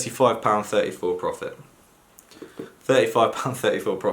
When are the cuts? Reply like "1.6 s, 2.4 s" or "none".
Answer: none

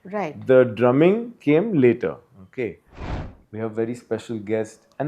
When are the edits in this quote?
2.9 s

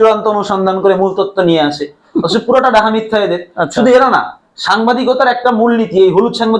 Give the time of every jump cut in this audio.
none

